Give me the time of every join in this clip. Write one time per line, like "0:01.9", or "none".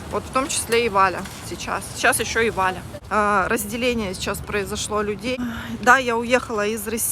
0:02.9
0:05.4